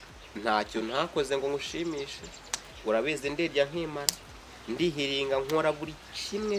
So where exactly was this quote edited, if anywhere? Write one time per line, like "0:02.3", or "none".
none